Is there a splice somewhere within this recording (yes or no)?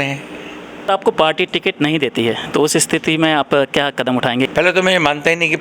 yes